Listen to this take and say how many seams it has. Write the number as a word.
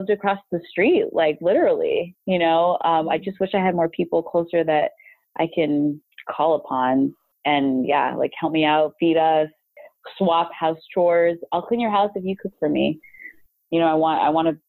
two